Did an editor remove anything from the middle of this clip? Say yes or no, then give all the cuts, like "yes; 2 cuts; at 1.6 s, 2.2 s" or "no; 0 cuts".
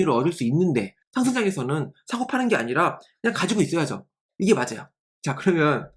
yes; 1 cut; at 1.0 s